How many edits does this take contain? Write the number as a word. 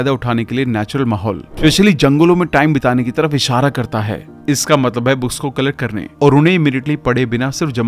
one